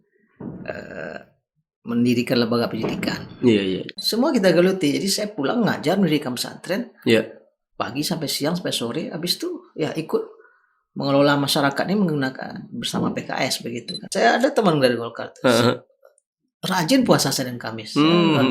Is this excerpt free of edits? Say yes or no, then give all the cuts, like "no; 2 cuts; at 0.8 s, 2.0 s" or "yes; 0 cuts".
no; 2 cuts; at 4.0 s, 14.1 s